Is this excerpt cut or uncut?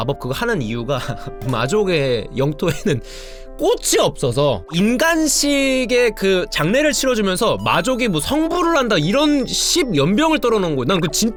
uncut